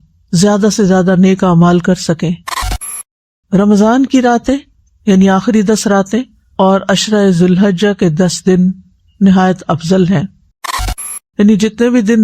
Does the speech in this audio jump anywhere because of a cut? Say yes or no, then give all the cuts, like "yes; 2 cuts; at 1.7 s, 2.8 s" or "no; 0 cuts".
yes; 2 cuts; at 2.9 s, 11.0 s